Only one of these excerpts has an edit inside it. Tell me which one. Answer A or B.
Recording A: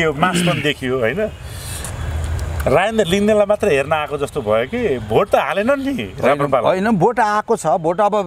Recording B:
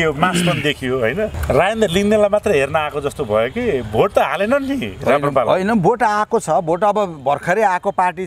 B